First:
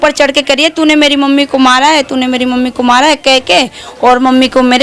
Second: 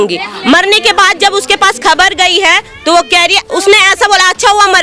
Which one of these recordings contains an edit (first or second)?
second